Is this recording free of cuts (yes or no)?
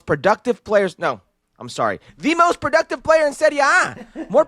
yes